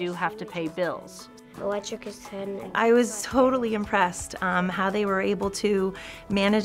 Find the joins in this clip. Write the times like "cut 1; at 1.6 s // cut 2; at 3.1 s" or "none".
cut 1; at 1.2 s // cut 2; at 2.7 s

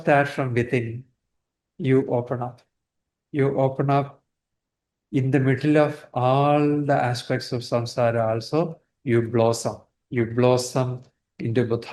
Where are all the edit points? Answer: none

